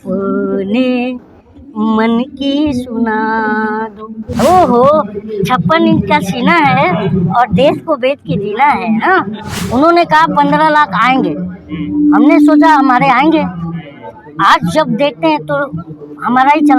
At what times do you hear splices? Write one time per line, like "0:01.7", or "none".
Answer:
0:04.4
0:09.6